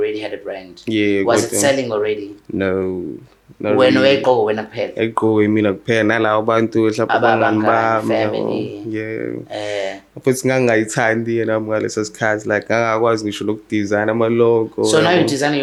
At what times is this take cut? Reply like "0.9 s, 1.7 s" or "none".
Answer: none

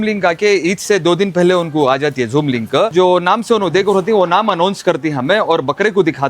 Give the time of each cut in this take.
2.9 s

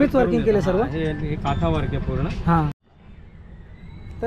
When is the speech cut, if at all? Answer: 2.9 s

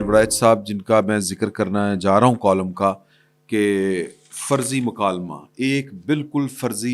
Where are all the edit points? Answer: none

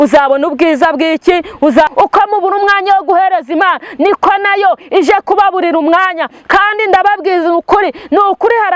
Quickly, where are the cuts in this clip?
1.9 s

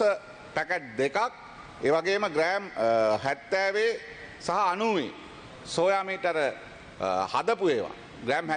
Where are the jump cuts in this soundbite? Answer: none

